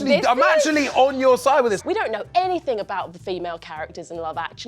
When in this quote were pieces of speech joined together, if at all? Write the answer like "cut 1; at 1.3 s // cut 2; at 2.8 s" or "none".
cut 1; at 1.8 s